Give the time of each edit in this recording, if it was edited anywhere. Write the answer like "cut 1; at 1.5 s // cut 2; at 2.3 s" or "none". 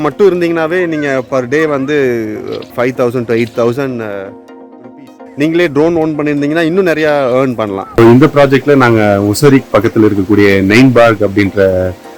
cut 1; at 2.7 s // cut 2; at 5.0 s // cut 3; at 7.8 s

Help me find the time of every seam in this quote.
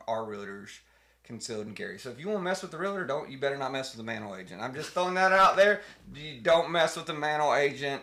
none

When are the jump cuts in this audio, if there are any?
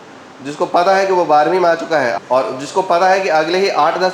cut 1; at 2.1 s

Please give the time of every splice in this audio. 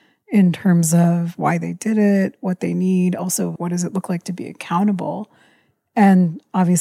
none

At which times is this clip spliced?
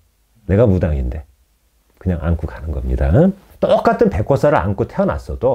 cut 1; at 3.5 s

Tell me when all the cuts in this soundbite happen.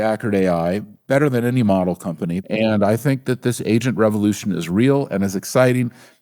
cut 1; at 2.5 s

